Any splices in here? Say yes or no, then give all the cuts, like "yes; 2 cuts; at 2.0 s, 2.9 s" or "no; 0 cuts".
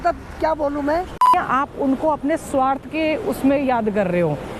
yes; 1 cut; at 1.3 s